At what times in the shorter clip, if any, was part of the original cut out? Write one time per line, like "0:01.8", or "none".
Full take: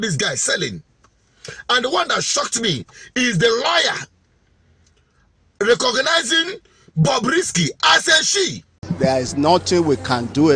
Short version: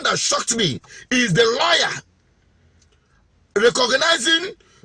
none